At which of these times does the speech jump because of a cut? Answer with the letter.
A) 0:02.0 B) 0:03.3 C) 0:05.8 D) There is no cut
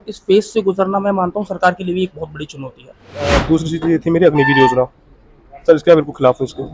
B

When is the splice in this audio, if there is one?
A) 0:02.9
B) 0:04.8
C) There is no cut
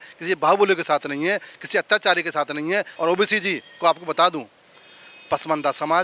C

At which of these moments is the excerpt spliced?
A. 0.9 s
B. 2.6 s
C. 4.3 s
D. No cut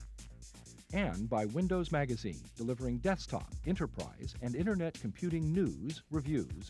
A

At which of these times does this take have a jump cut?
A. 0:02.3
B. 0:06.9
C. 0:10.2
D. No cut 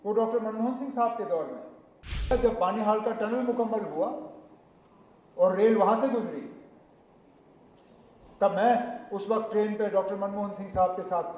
A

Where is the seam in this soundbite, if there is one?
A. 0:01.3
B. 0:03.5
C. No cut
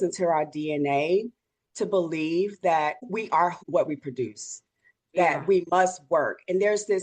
B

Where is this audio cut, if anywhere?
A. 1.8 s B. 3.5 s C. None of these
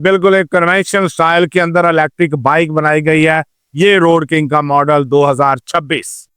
C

